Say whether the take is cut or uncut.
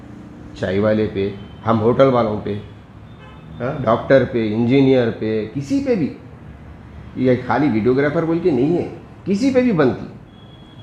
uncut